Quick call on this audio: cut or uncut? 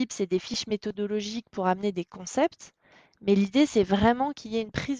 uncut